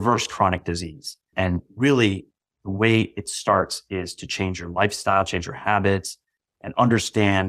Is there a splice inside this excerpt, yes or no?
yes